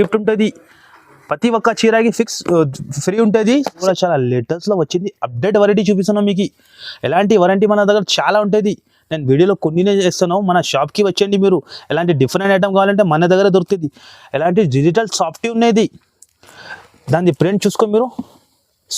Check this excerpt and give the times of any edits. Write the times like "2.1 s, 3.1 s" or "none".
3.8 s